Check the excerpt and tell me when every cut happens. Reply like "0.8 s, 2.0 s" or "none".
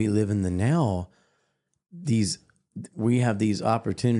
none